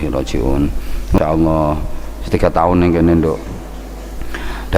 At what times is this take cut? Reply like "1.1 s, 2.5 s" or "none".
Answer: 1.2 s

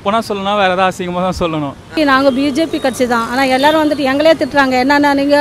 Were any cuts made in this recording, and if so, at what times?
1.8 s

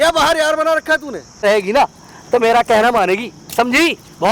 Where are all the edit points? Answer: 1.4 s

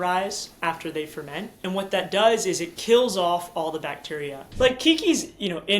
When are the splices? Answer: 1.5 s, 4.4 s

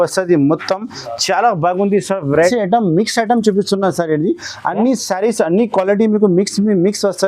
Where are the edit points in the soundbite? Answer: 2.4 s

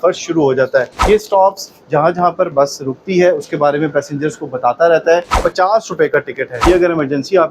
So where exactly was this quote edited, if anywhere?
0.9 s, 5.4 s, 6.6 s

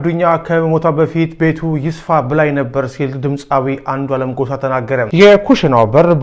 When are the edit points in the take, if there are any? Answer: 5.1 s

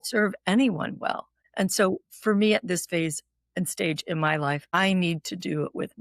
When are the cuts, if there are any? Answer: 1.4 s, 4.7 s

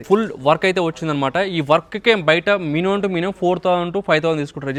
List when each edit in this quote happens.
none

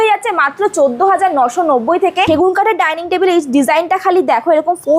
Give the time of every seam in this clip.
2.3 s

